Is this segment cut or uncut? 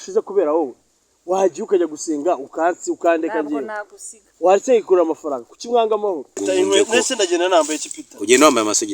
cut